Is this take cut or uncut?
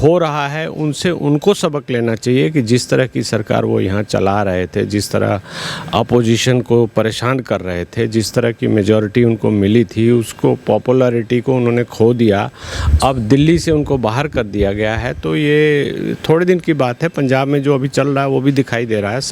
uncut